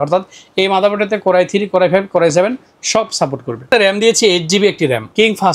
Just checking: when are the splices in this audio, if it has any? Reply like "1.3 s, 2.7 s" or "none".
3.7 s